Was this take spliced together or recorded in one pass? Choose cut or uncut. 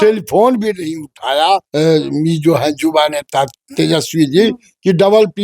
cut